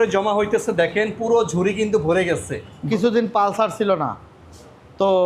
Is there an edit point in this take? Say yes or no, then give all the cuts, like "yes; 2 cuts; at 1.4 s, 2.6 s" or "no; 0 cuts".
yes; 1 cut; at 2.9 s